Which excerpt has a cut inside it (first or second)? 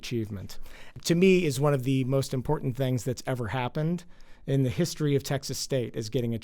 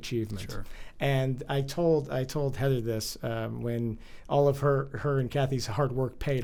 first